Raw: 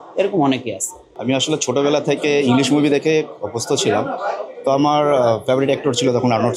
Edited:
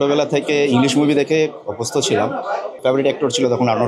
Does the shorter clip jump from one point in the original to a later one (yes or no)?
yes